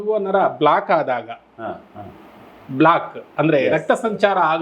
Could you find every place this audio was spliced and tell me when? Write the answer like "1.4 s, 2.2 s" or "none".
none